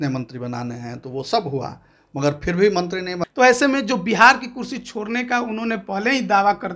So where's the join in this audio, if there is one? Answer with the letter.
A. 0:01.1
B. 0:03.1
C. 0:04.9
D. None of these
B